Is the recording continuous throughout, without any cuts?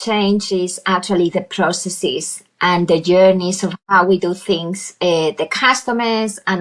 yes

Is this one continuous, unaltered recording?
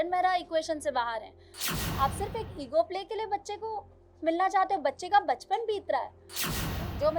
no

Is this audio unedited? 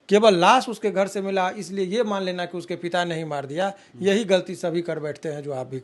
yes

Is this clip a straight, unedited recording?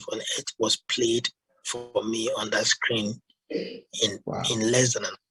yes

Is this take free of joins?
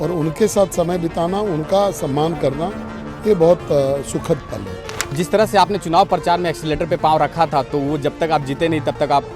no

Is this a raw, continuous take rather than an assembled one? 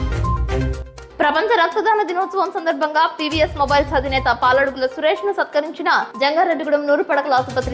yes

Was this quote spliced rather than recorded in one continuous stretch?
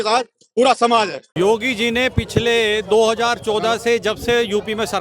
yes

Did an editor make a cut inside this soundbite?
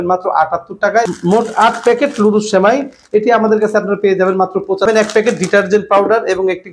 yes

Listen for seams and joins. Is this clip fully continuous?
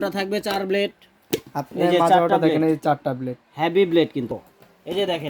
no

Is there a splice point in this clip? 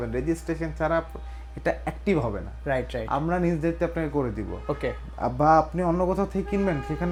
no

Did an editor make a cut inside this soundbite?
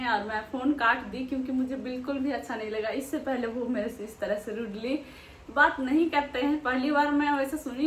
no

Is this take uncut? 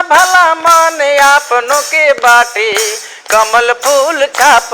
yes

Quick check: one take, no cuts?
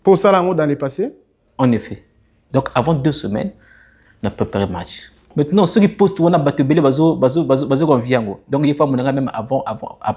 no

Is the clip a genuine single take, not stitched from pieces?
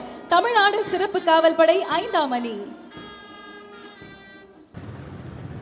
no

